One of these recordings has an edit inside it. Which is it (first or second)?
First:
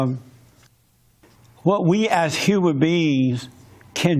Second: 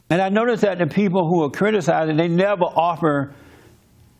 second